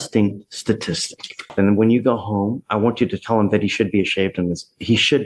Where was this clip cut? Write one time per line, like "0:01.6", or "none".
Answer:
0:01.5